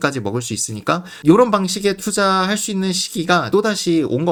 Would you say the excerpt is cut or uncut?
uncut